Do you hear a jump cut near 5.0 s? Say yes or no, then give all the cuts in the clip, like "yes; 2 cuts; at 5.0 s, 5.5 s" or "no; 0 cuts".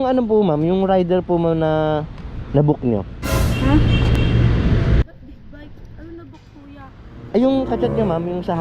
yes; 1 cut; at 5.0 s